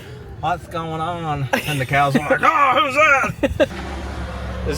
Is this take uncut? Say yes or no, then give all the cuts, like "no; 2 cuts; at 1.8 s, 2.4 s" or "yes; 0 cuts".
no; 1 cut; at 3.8 s